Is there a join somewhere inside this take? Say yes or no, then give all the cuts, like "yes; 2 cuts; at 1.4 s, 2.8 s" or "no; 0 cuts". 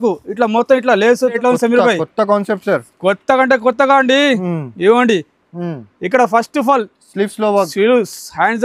yes; 1 cut; at 1.4 s